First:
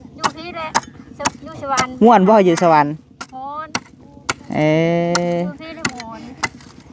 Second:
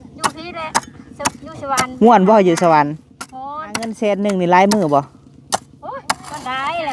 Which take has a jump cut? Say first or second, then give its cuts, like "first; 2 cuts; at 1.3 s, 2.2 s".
second; 1 cut; at 4.1 s